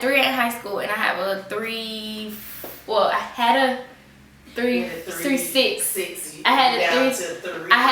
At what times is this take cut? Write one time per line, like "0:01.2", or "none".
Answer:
none